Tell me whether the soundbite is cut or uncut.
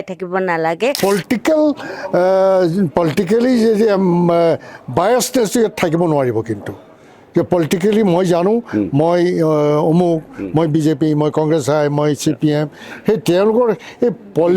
cut